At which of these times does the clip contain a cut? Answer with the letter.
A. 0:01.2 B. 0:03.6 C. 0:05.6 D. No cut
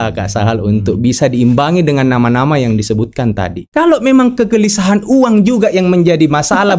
B